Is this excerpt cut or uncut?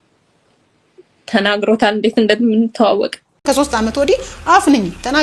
cut